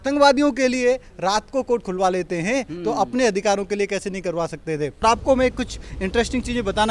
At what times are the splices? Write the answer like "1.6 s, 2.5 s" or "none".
5.0 s